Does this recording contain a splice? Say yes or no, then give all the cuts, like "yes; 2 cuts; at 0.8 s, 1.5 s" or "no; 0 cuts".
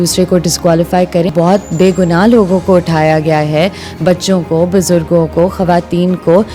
yes; 1 cut; at 1.3 s